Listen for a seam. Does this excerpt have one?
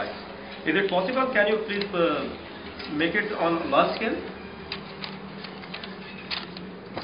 no; 0 cuts

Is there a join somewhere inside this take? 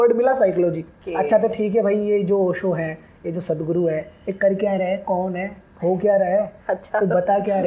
yes; 1 cut; at 1.0 s

